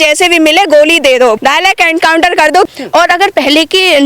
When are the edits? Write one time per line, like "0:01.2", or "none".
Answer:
0:01.4
0:02.7

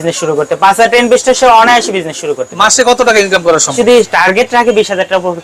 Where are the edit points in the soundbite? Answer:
0:03.7

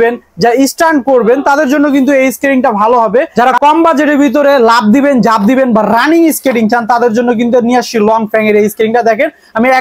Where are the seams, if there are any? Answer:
0:03.3

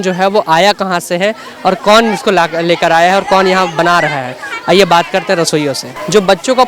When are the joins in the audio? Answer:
none

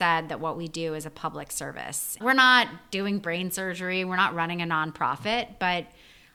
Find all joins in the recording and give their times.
none

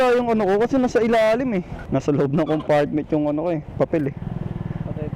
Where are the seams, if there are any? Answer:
0:01.8

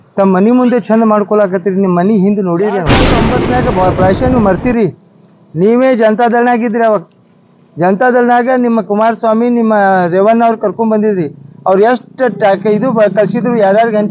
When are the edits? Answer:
0:03.2

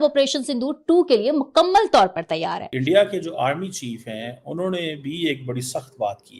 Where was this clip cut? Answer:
0:02.7

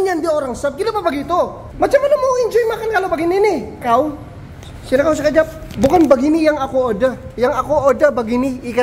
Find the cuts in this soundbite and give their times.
0:01.6
0:03.8
0:05.7

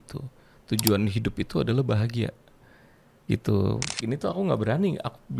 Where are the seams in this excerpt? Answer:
0:03.9

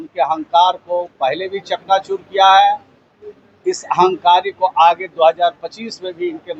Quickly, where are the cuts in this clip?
none

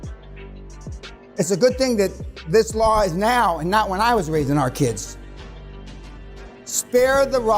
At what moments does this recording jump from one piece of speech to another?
0:01.3

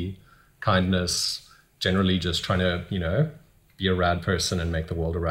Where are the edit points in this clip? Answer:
none

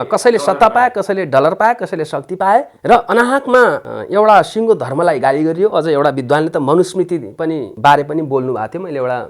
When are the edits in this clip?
0:02.7
0:03.9
0:07.7

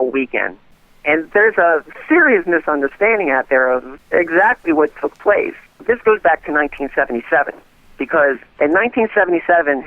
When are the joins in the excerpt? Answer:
0:05.8

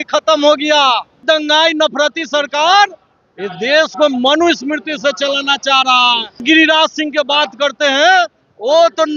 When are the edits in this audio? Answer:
0:01.2
0:06.4

